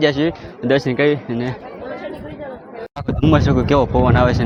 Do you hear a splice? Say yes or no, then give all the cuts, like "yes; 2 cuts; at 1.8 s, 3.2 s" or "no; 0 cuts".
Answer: no; 0 cuts